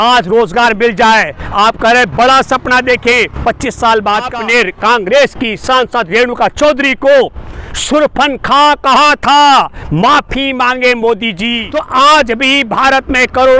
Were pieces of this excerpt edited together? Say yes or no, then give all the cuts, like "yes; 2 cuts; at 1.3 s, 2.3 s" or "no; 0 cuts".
yes; 2 cuts; at 4.3 s, 11.6 s